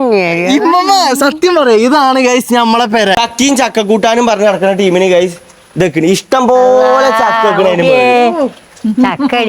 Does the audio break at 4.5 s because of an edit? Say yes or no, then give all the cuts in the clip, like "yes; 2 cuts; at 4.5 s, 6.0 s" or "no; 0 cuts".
no; 1 cut; at 3.2 s